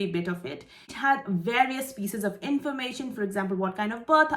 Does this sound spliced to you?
yes; 1 cut; at 1.0 s

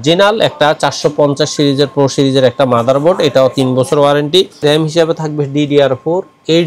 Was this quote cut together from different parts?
yes; 1 cut; at 4.6 s

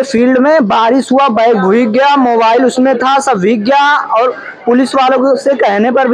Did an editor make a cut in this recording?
no; 0 cuts

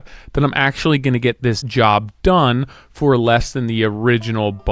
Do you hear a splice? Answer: yes; 1 cut; at 1.6 s

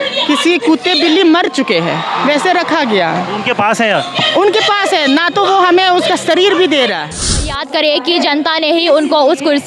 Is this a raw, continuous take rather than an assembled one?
no; 1 cut; at 7.5 s

